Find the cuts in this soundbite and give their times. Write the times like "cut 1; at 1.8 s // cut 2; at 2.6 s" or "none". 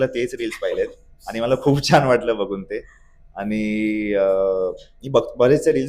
none

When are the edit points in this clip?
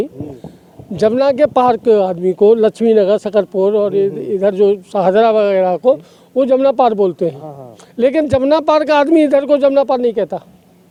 none

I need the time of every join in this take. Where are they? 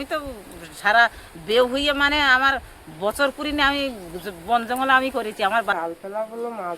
cut 1; at 5.7 s

